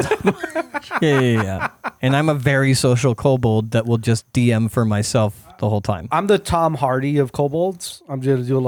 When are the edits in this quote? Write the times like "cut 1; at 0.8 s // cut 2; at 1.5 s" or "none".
none